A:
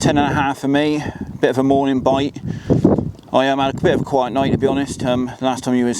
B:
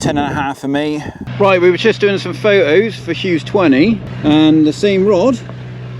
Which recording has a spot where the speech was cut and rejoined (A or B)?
B